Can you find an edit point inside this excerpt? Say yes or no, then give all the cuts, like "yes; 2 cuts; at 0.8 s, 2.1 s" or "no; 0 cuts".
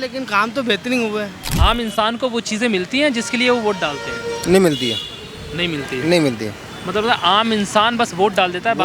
yes; 1 cut; at 1.4 s